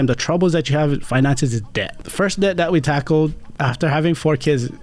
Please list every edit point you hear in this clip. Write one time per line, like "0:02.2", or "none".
0:01.9
0:03.5